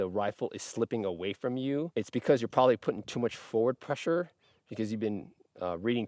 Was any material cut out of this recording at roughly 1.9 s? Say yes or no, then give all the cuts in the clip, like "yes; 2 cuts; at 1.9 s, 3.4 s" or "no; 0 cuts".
yes; 1 cut; at 1.9 s